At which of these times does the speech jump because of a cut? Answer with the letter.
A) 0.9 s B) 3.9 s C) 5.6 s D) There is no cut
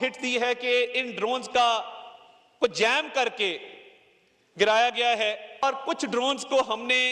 C